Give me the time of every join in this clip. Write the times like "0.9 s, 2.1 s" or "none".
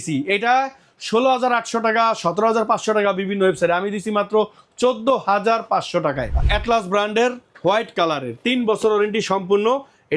6.3 s